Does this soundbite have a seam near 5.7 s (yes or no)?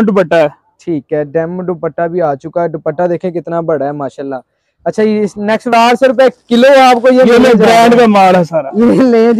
yes